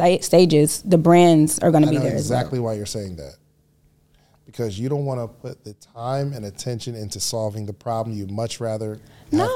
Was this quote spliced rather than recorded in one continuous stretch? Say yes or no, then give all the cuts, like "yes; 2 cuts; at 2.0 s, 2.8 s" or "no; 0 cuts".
no; 0 cuts